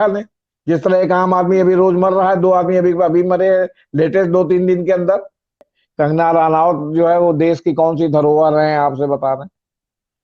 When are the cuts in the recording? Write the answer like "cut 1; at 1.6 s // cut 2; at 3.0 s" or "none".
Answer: cut 1; at 5.8 s